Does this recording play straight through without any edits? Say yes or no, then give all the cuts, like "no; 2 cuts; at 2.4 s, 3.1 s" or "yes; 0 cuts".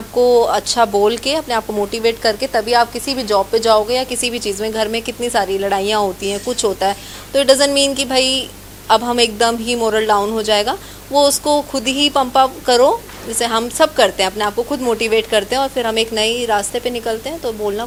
yes; 0 cuts